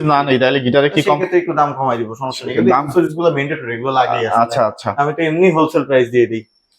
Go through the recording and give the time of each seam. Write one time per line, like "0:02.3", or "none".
none

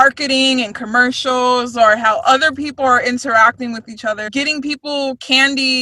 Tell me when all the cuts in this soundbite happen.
0:04.2

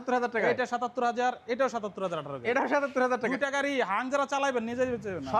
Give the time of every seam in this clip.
none

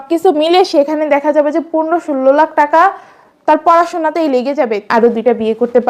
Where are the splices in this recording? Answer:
0:04.8

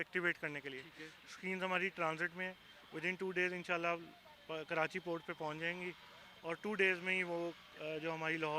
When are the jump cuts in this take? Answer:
none

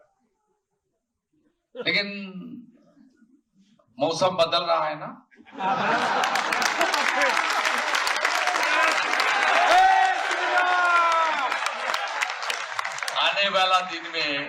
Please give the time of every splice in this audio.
none

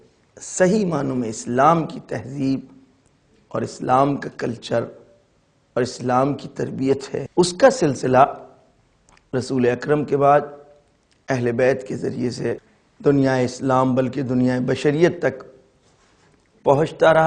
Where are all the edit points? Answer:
0:07.2
0:12.7

